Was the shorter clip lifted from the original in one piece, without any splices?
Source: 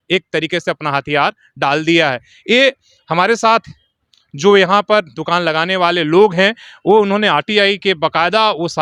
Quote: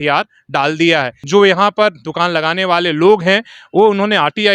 no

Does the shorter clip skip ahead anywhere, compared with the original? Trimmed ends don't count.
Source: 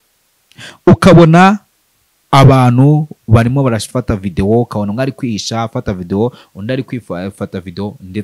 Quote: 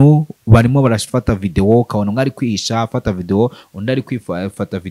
no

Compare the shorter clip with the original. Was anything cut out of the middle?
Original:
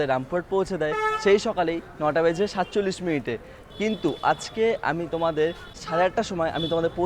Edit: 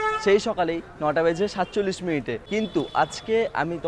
yes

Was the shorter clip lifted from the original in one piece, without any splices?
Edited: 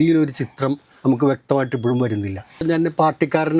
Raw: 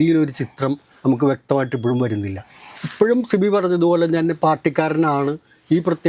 no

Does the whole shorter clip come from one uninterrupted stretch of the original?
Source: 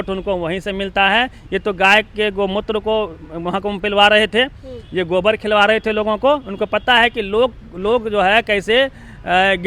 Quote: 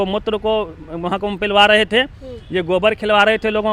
yes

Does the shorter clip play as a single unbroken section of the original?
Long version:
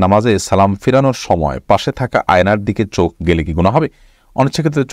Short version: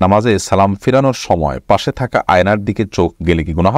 yes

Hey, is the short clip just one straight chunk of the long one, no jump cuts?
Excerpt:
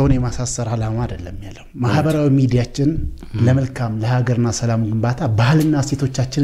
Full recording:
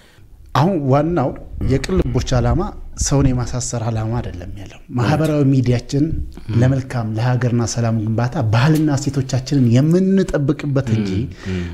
yes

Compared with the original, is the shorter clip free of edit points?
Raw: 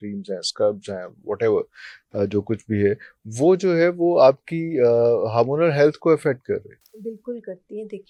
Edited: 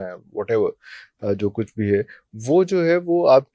yes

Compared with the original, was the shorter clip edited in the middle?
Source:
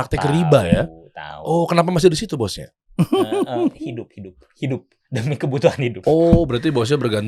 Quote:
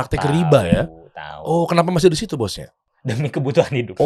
yes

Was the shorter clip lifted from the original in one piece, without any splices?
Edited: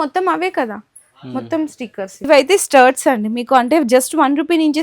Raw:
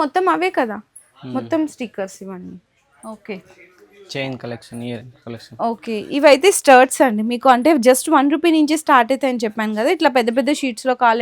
no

